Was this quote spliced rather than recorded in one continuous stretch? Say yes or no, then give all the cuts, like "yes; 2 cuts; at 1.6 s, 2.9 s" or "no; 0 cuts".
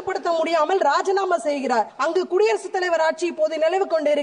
yes; 1 cut; at 1.9 s